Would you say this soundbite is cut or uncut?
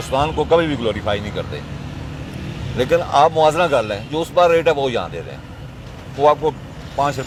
uncut